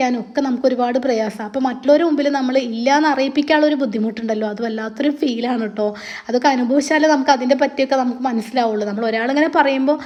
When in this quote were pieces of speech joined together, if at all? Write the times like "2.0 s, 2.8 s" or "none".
none